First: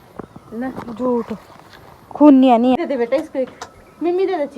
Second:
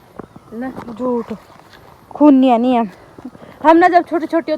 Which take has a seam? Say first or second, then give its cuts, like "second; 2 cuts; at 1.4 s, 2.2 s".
first; 1 cut; at 2.8 s